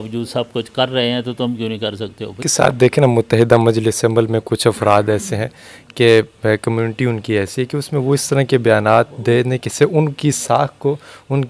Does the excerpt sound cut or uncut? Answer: cut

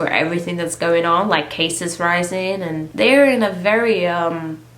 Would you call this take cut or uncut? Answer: cut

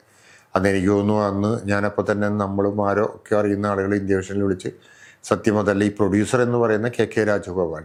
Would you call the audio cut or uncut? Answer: uncut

